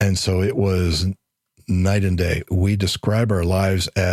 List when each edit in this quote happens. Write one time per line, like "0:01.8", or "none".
0:02.5